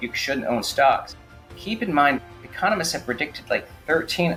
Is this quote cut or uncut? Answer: uncut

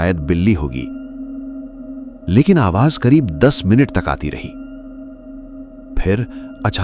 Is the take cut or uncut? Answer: uncut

